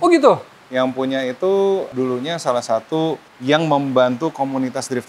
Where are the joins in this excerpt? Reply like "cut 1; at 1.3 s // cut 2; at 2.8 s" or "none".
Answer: cut 1; at 1.9 s // cut 2; at 3.3 s